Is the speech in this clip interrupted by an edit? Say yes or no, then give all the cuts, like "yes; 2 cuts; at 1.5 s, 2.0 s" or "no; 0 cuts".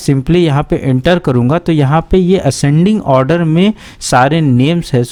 no; 0 cuts